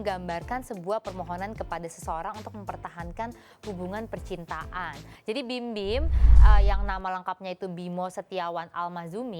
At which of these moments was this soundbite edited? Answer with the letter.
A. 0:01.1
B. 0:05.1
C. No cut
B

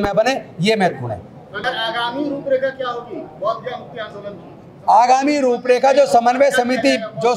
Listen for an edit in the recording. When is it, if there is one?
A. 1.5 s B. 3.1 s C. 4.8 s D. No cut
A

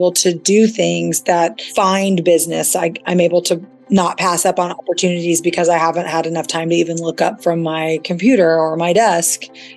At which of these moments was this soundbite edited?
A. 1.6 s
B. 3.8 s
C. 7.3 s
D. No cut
A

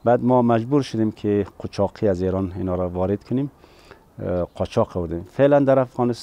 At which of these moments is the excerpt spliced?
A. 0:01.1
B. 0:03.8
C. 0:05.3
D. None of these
D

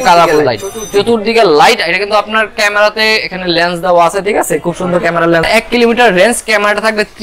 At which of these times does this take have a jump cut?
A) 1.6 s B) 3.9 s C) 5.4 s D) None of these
C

